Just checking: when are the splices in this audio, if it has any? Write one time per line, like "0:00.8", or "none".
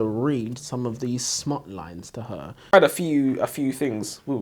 0:02.7